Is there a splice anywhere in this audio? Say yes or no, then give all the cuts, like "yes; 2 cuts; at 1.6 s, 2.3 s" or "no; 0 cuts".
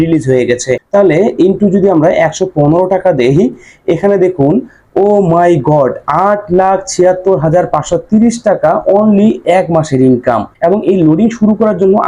yes; 2 cuts; at 0.8 s, 10.5 s